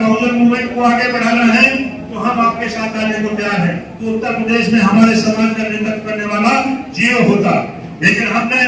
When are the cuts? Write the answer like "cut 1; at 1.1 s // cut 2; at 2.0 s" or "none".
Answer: cut 1; at 3.9 s

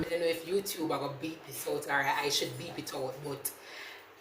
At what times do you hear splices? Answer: none

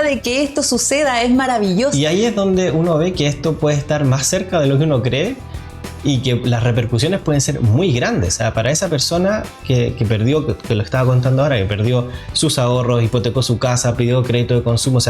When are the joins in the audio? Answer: cut 1; at 1.9 s

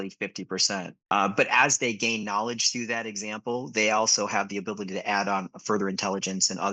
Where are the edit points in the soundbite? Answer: cut 1; at 0.9 s

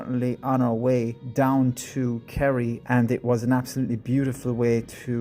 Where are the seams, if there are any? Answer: cut 1; at 1.2 s // cut 2; at 2.8 s

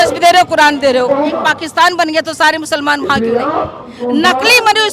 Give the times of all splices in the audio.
cut 1; at 1.4 s // cut 2; at 3.9 s

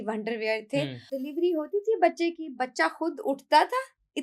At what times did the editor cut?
cut 1; at 1.1 s

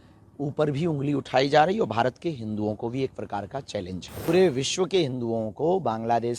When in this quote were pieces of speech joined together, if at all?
cut 1; at 4.3 s

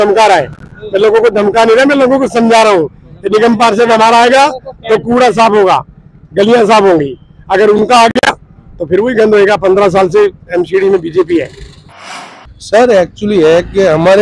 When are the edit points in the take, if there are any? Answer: cut 1; at 12.0 s

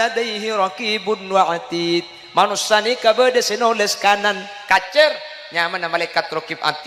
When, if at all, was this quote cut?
none

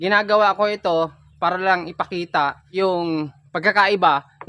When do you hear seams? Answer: cut 1; at 2.6 s

